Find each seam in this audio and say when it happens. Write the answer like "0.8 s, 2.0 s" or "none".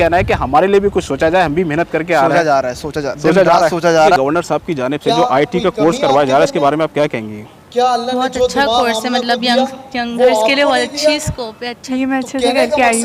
4.2 s, 11.8 s